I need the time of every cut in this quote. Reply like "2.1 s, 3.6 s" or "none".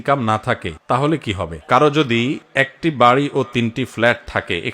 1.5 s